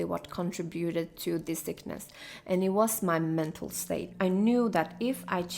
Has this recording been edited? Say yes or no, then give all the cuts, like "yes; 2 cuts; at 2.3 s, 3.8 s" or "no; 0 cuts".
yes; 1 cut; at 4.1 s